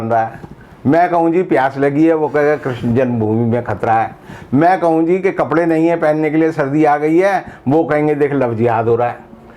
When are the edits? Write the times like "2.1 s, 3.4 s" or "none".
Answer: none